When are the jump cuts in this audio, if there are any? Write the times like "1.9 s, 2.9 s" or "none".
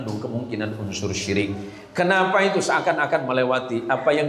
none